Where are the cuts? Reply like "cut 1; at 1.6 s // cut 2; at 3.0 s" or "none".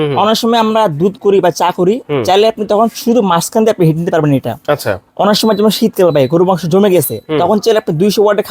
none